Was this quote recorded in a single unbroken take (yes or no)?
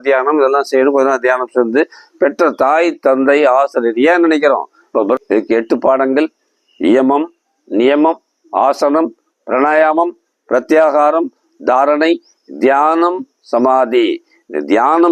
no